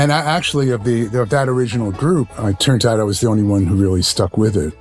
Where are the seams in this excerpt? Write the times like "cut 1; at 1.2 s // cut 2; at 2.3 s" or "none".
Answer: cut 1; at 2.3 s